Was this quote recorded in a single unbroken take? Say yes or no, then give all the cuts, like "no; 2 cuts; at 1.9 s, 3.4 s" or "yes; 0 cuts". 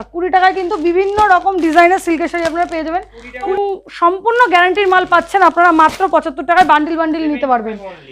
no; 1 cut; at 3.5 s